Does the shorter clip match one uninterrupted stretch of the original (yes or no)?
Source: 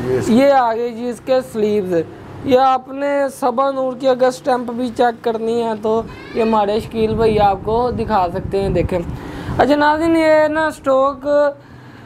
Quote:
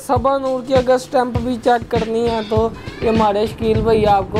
yes